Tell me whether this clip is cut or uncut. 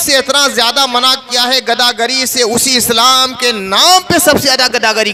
uncut